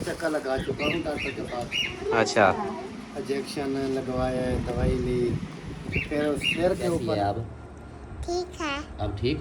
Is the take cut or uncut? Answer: cut